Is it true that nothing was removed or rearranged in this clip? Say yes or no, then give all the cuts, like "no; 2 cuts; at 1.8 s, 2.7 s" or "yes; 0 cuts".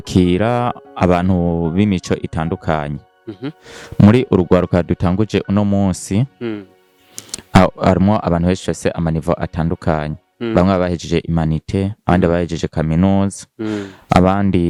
yes; 0 cuts